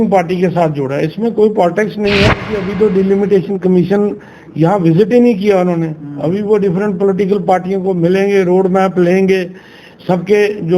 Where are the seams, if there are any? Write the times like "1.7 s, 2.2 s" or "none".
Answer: 2.6 s